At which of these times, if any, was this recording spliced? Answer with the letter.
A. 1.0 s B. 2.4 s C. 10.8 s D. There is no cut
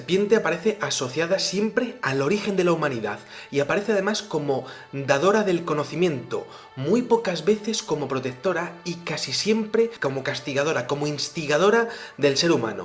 D